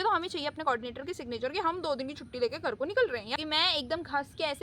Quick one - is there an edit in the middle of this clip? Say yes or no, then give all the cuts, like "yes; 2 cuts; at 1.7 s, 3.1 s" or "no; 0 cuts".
yes; 1 cut; at 3.4 s